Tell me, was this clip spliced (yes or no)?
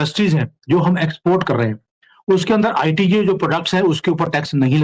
no